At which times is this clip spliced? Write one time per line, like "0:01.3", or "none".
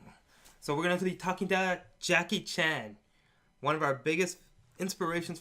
0:01.9